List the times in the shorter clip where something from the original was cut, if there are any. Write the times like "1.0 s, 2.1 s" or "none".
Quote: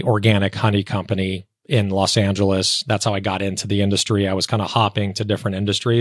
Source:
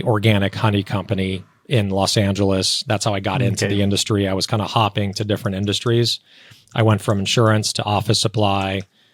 none